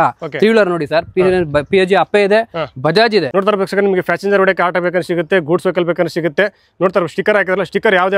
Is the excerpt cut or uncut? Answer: cut